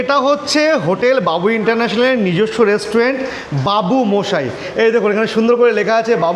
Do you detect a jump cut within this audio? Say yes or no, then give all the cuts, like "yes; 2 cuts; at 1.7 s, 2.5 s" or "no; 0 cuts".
no; 0 cuts